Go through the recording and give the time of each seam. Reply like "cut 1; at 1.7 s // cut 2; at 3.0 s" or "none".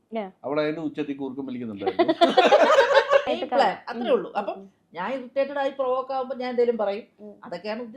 cut 1; at 3.2 s